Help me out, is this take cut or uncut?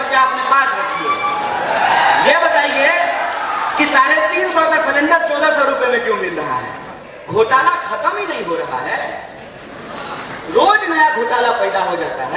cut